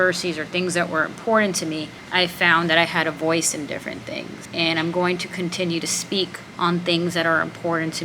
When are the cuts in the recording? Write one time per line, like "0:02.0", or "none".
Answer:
0:02.0
0:04.4
0:06.1